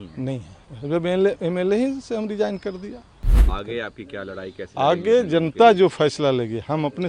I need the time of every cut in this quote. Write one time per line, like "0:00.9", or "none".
0:03.4